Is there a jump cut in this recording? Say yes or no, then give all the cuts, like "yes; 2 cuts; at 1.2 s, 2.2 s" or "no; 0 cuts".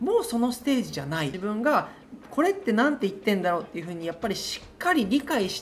yes; 1 cut; at 1.4 s